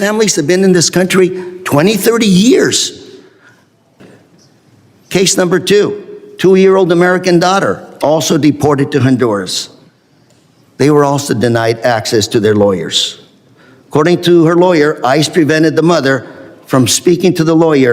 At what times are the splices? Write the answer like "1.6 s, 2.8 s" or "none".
4.0 s